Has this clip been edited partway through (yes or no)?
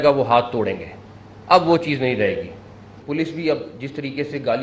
yes